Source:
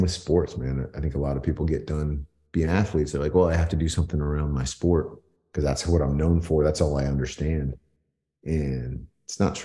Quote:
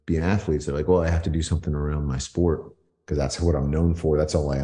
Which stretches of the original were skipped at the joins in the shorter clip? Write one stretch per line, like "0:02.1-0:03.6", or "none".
none